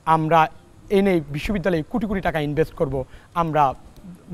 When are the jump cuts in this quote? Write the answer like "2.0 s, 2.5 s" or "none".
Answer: none